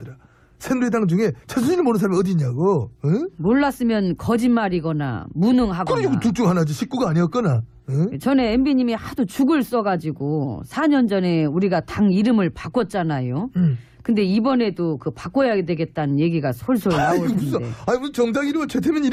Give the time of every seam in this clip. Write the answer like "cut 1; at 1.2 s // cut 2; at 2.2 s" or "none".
none